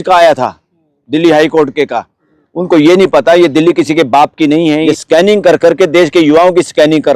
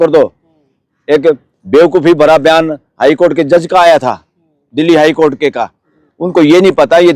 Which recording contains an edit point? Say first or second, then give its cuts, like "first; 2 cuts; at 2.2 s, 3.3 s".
first; 1 cut; at 4.8 s